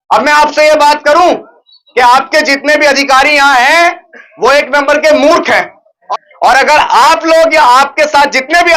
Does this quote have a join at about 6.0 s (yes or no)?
yes